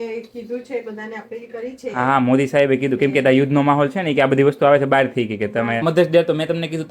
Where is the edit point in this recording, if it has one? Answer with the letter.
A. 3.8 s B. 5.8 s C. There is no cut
B